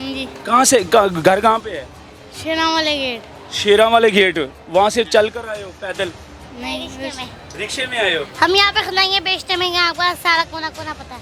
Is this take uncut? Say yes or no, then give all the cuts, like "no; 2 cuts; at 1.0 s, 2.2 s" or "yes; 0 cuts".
yes; 0 cuts